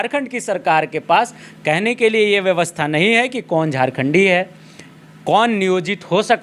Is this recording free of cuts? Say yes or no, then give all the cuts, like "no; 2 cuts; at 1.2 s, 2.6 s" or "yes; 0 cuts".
yes; 0 cuts